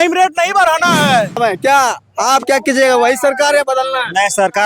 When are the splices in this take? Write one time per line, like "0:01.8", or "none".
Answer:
0:01.4